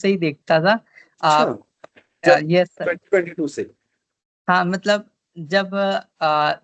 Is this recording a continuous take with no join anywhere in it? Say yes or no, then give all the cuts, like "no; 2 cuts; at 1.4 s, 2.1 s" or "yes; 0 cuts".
yes; 0 cuts